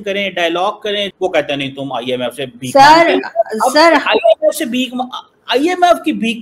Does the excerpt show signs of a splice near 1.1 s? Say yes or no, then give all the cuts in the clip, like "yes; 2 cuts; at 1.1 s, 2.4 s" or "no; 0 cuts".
yes; 1 cut; at 1.1 s